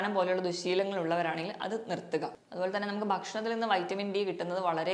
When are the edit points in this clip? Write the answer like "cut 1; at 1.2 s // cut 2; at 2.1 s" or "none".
cut 1; at 2.4 s